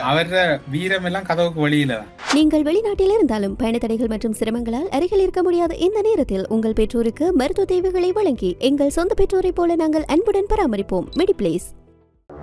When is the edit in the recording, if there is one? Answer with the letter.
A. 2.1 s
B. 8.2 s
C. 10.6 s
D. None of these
A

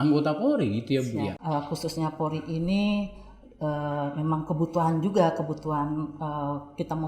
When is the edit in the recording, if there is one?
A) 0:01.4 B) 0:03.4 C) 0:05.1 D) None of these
A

